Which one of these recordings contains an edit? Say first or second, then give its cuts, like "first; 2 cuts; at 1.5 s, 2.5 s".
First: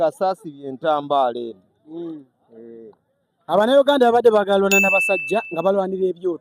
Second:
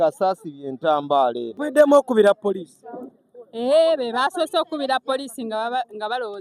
second; 1 cut; at 1.5 s